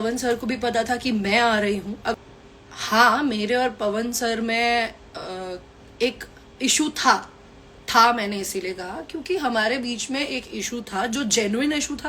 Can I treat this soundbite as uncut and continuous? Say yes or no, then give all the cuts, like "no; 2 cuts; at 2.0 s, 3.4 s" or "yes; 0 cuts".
no; 1 cut; at 2.1 s